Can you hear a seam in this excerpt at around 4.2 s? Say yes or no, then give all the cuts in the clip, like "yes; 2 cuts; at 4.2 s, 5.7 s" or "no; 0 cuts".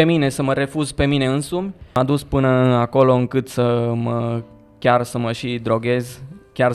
no; 1 cut; at 2.0 s